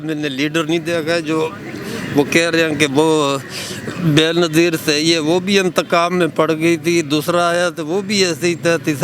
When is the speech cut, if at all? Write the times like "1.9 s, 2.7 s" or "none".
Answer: none